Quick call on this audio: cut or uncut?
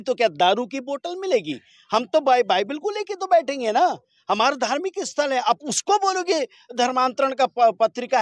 uncut